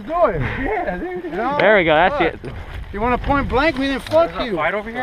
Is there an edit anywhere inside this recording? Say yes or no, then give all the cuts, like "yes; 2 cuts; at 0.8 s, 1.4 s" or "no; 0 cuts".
no; 0 cuts